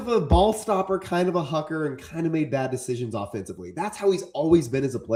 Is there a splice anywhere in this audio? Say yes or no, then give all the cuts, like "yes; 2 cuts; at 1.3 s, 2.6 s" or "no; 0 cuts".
no; 0 cuts